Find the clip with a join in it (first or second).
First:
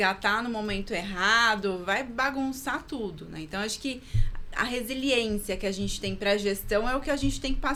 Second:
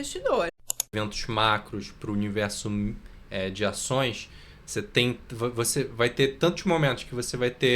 second